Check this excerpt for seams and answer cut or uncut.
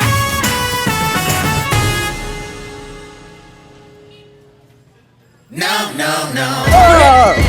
uncut